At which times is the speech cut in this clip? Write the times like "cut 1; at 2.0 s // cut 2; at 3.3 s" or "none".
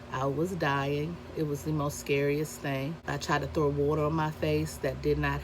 cut 1; at 3.0 s